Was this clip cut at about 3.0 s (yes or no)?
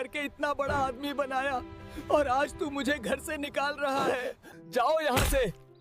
no